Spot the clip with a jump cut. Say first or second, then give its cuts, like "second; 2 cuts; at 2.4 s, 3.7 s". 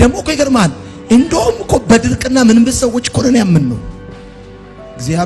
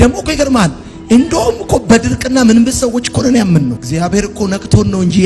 second; 1 cut; at 3.8 s